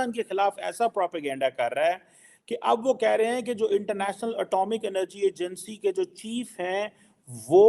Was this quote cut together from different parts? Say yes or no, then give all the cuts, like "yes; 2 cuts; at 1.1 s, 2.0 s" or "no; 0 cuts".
no; 0 cuts